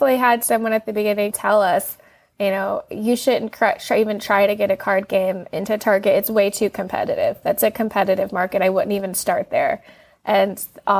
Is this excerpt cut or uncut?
cut